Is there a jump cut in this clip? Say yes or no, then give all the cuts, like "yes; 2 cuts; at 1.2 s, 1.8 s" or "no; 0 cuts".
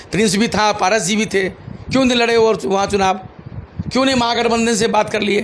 no; 0 cuts